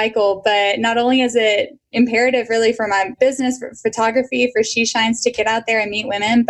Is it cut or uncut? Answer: uncut